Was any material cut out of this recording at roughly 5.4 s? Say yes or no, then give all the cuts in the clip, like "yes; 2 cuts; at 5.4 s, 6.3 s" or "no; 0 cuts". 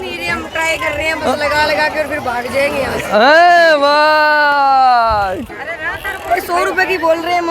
yes; 1 cut; at 5.4 s